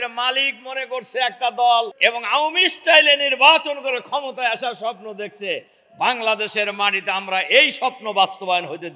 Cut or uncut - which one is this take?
cut